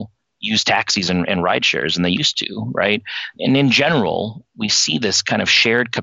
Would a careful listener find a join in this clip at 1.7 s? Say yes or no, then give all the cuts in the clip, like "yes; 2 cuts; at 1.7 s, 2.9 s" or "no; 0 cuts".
no; 1 cut; at 3.3 s